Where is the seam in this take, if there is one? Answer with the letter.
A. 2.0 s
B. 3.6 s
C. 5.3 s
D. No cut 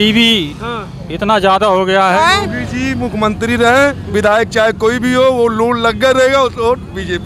A